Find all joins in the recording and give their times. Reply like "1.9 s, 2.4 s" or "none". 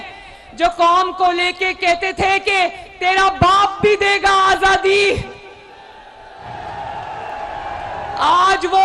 none